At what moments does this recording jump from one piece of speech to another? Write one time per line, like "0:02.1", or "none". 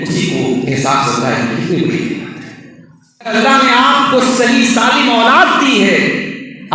0:03.3